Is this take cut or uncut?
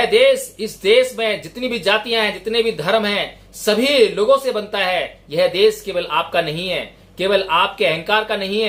uncut